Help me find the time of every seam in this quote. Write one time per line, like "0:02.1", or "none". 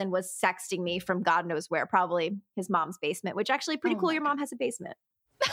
none